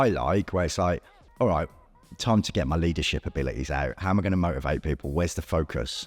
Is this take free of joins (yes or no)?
yes